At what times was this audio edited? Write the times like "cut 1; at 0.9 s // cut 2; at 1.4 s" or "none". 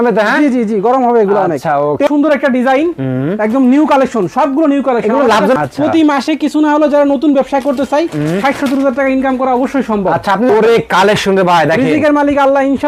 cut 1; at 2.1 s // cut 2; at 5.6 s // cut 3; at 10.5 s